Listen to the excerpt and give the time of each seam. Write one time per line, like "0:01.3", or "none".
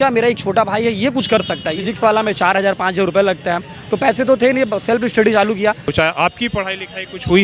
0:01.8
0:05.9